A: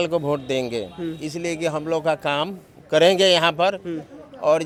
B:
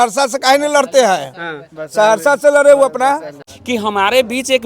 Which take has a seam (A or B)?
B